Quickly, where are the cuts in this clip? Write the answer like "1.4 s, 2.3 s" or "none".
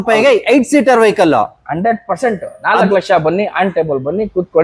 none